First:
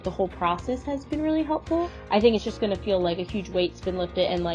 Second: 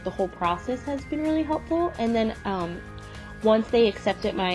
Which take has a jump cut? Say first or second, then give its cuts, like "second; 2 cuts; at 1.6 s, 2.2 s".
first; 1 cut; at 2.0 s